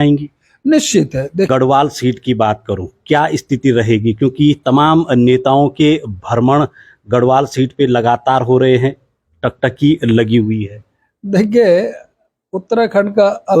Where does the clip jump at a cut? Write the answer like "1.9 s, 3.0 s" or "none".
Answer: 1.5 s